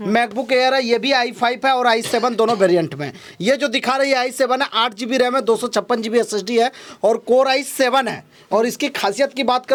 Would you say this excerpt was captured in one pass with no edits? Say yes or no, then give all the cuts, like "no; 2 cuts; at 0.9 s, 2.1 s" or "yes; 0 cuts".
yes; 0 cuts